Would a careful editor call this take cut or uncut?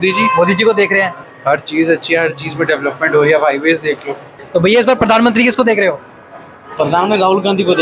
cut